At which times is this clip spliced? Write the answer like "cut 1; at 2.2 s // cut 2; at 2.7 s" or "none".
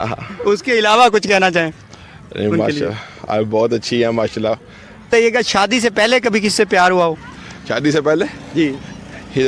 none